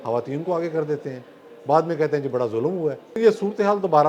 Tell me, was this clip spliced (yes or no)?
yes